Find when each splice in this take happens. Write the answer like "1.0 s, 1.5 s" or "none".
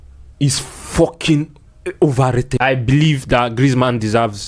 2.5 s